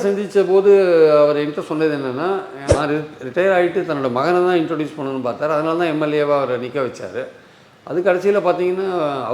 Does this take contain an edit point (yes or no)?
yes